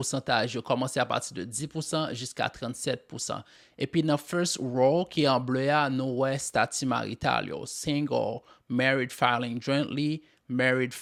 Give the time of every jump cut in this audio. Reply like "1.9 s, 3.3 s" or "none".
none